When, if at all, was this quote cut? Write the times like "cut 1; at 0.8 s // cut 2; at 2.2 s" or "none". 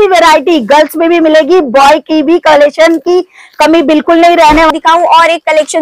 cut 1; at 4.7 s